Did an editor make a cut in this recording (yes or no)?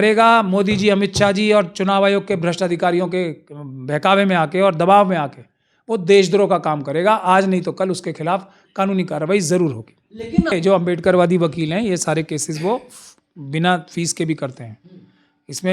yes